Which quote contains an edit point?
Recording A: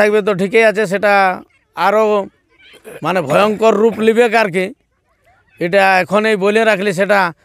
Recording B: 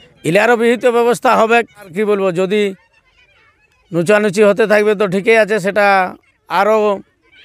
B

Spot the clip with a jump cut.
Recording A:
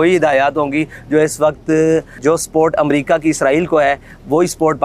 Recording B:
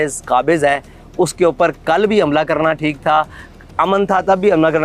A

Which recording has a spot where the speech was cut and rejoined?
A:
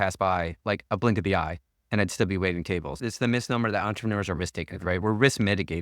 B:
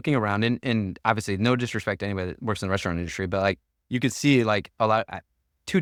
A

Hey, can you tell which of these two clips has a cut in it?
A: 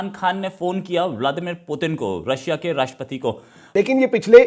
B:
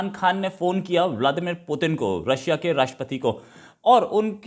A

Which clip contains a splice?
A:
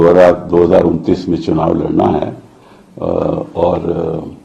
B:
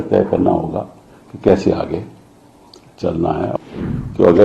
B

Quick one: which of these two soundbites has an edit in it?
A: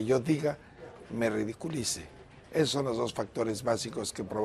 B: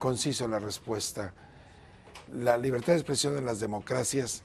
B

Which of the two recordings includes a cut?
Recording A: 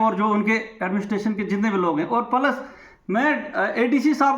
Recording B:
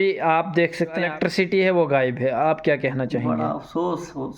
B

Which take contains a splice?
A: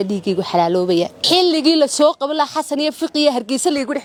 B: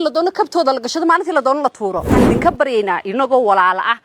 B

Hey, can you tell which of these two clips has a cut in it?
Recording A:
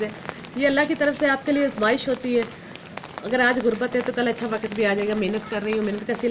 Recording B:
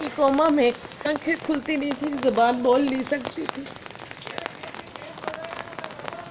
B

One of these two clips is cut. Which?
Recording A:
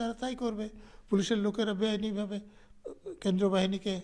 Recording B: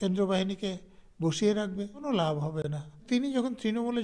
B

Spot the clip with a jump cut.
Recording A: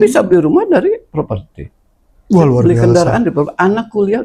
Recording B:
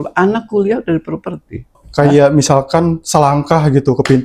B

